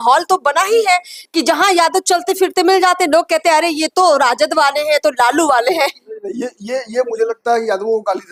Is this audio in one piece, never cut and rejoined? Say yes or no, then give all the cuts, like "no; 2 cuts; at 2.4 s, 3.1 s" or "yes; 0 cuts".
yes; 0 cuts